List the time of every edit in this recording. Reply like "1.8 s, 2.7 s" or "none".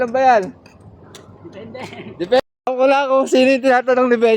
2.4 s